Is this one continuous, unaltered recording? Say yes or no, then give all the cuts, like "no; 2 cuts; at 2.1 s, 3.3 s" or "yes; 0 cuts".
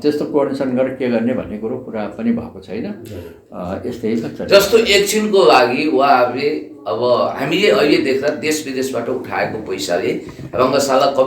yes; 0 cuts